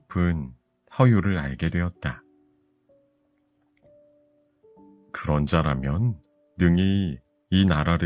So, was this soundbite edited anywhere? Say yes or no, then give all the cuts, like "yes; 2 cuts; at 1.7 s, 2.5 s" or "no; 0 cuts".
no; 0 cuts